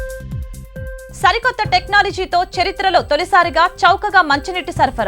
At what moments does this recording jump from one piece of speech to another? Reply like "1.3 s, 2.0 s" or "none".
1.1 s